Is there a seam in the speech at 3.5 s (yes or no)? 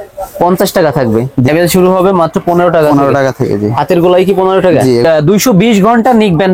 no